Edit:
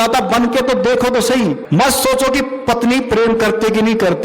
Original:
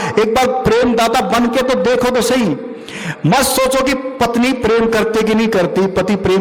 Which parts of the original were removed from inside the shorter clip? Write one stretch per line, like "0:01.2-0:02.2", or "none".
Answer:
0:02.6-0:03.1